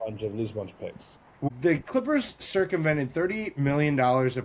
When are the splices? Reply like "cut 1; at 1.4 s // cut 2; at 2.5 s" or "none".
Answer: cut 1; at 1.3 s